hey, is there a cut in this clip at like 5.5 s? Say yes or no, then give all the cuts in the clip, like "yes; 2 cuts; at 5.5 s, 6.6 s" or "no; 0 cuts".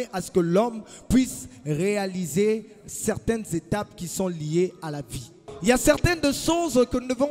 yes; 1 cut; at 5.5 s